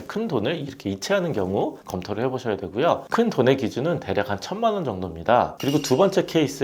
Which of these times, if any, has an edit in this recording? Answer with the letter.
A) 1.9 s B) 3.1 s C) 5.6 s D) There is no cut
C